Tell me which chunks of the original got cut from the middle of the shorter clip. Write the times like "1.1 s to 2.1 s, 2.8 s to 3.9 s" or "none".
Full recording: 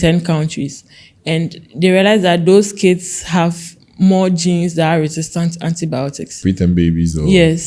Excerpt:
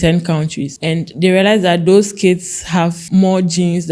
1.0 s to 1.6 s, 3.6 s to 3.9 s